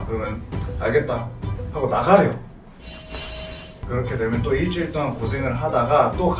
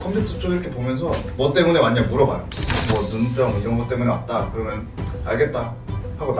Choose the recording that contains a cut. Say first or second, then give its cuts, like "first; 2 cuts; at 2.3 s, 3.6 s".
first; 1 cut; at 3.8 s